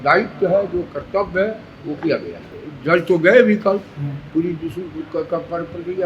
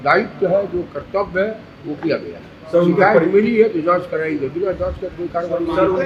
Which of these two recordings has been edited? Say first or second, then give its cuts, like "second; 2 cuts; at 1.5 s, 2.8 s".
first; 1 cut; at 2.6 s